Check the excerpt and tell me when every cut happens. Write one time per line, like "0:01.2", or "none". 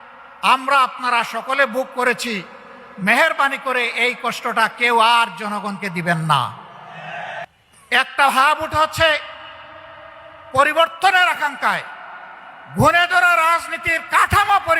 0:07.5

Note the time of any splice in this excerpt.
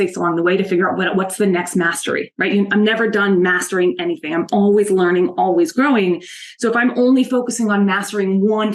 none

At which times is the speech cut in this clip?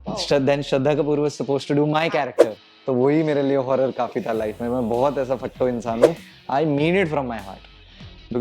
0:02.7
0:06.3

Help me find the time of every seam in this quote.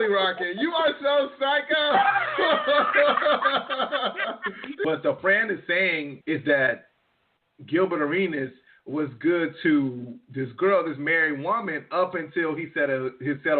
0:04.8
0:06.1

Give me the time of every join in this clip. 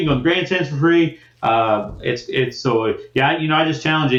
none

